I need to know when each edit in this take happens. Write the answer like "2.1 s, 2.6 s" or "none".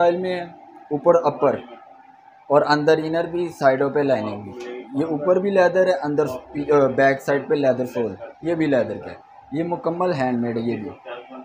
none